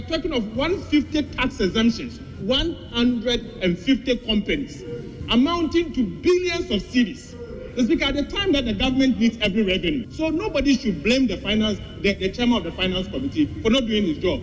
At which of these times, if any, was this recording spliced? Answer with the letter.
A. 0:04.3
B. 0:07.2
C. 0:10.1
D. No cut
C